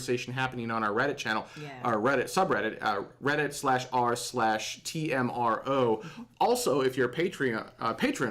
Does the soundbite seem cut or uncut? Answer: cut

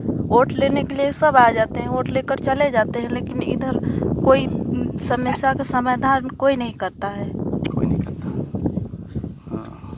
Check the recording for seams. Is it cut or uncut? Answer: uncut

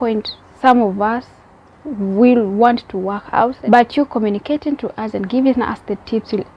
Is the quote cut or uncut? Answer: cut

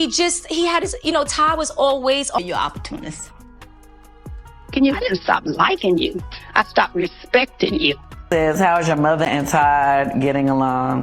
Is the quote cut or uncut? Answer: cut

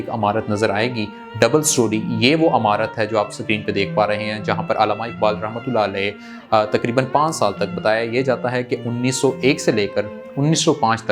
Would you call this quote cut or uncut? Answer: uncut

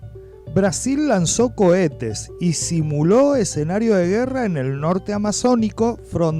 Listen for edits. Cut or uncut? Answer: uncut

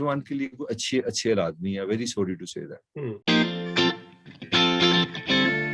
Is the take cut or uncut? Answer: uncut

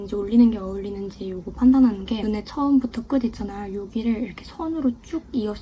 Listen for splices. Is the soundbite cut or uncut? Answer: uncut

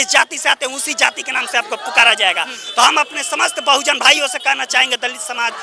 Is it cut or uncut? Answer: uncut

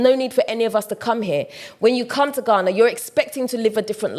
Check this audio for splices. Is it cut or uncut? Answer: uncut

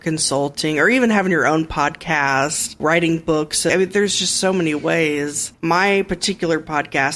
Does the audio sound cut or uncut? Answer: cut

